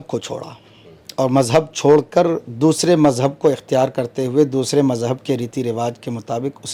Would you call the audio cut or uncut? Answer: uncut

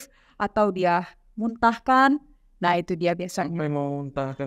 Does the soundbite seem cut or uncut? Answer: uncut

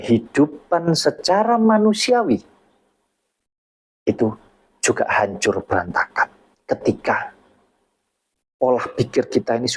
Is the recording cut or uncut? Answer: cut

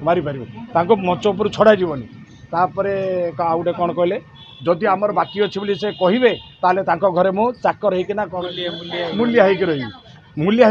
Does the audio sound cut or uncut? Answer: uncut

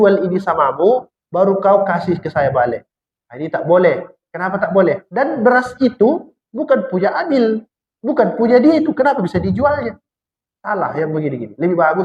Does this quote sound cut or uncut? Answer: cut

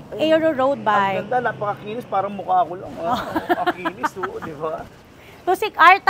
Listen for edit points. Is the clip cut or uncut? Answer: uncut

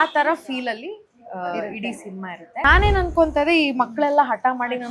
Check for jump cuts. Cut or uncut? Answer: cut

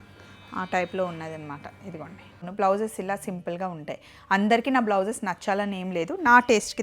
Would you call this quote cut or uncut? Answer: cut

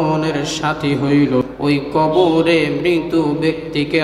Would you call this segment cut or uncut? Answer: cut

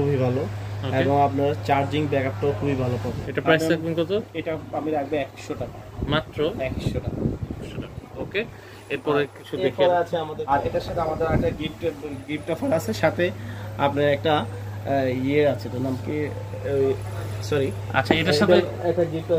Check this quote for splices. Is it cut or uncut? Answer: cut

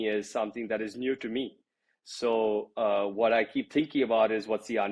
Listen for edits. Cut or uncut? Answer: uncut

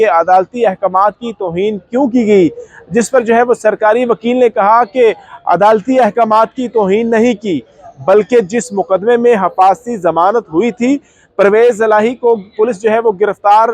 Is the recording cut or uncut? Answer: uncut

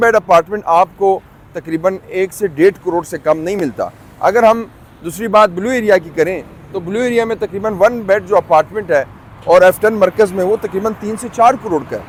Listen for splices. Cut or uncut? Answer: uncut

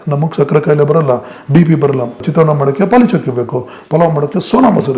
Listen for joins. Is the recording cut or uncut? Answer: cut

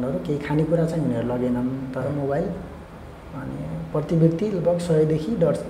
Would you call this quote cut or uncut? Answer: uncut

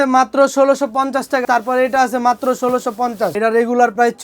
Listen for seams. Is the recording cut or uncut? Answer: cut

